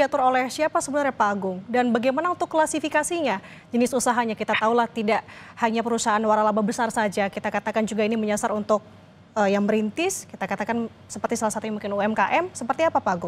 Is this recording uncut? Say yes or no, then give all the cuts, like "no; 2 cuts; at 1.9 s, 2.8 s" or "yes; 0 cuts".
yes; 0 cuts